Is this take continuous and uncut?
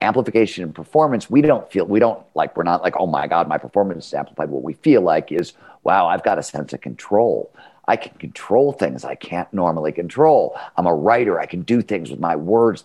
yes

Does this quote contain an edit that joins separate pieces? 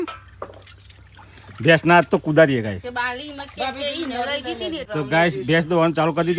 yes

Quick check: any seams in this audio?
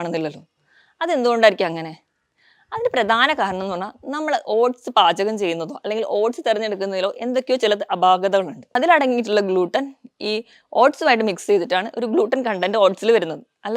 yes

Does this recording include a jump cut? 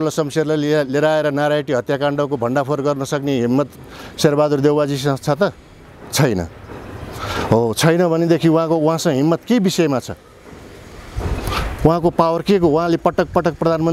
no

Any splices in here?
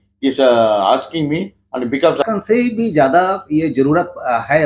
yes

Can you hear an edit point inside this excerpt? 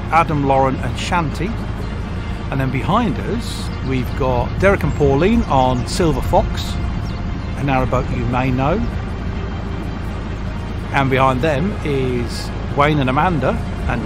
yes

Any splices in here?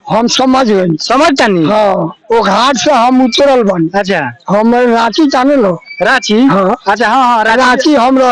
no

